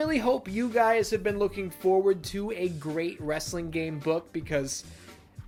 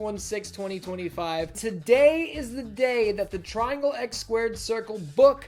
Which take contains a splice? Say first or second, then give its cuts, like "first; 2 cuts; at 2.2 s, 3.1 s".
second; 1 cut; at 1.6 s